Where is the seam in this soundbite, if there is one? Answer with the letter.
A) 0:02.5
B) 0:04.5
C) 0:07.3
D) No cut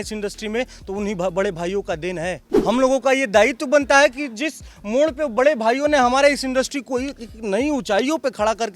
A